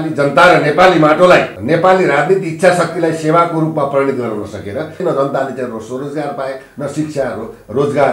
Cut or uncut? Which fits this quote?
cut